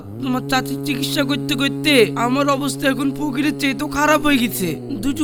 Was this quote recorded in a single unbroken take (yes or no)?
yes